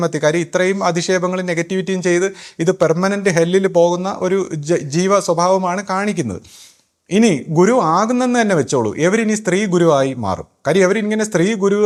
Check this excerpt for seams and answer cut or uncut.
uncut